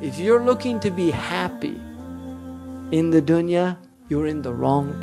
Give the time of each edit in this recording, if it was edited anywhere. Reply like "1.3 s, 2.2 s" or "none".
3.9 s

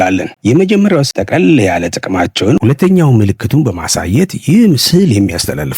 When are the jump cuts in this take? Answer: 1.1 s, 2.6 s

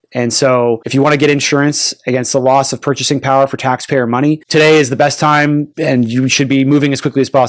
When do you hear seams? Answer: 0.8 s, 4.4 s, 5.7 s

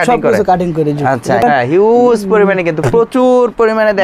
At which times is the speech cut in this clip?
1.4 s

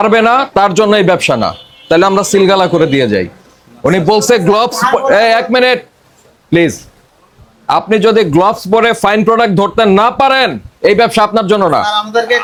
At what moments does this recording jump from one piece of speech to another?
none

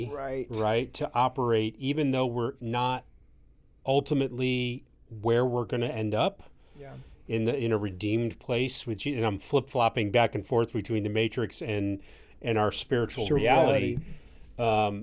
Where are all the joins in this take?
none

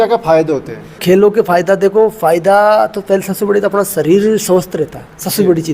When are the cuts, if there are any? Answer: 1.0 s

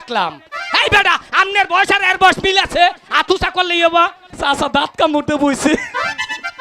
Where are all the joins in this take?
4.3 s

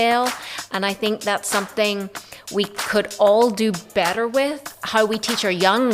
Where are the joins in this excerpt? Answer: 4.7 s

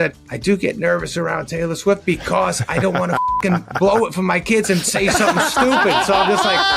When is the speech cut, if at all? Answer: none

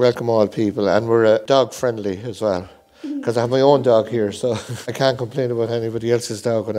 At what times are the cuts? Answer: none

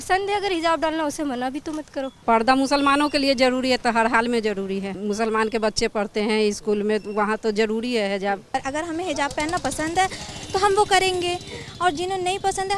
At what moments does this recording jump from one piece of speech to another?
2.1 s, 4.9 s, 8.6 s

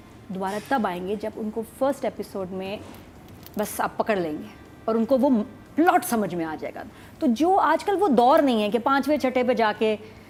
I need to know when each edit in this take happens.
none

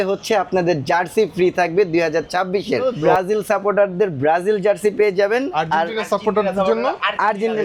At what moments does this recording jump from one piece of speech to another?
none

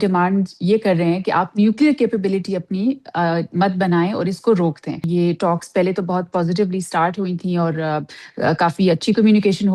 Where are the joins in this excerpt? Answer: 5.0 s

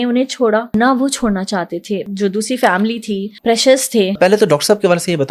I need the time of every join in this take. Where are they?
0.7 s, 2.1 s, 3.3 s, 4.2 s

